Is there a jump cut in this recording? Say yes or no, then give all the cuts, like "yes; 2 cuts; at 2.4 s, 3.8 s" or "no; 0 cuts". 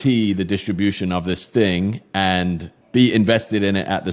yes; 1 cut; at 2.7 s